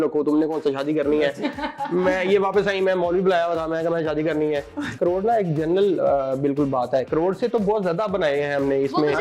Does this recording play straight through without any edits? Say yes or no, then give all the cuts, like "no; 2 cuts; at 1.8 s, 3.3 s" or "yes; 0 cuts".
no; 1 cut; at 5.0 s